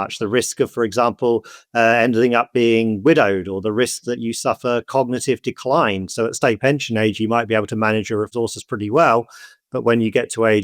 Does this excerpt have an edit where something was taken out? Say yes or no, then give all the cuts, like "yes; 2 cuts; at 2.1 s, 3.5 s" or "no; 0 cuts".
yes; 1 cut; at 8.3 s